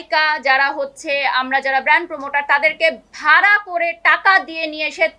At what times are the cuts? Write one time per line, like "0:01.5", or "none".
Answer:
none